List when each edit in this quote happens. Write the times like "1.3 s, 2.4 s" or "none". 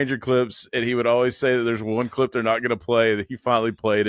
none